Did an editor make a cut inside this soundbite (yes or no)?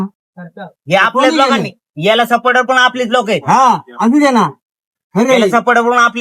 no